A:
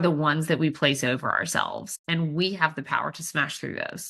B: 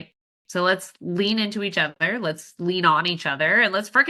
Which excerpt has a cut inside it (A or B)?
A